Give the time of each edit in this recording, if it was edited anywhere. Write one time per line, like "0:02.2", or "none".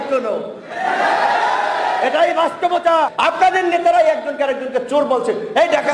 0:03.1